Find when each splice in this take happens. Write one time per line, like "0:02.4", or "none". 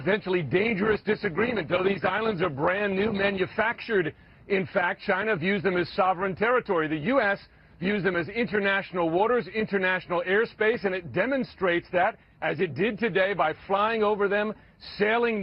0:01.2